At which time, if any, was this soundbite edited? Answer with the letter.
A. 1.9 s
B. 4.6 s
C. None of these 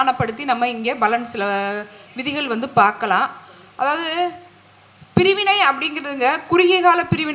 C